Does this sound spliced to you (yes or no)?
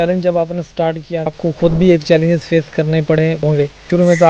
yes